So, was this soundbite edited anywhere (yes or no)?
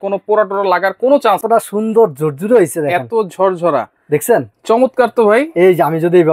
yes